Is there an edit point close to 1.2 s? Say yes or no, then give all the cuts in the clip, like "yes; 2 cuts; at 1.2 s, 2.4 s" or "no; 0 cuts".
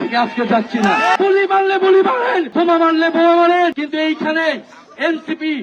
yes; 3 cuts; at 1.2 s, 2.5 s, 3.8 s